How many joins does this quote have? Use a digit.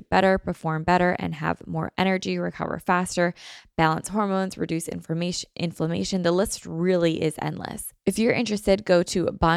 1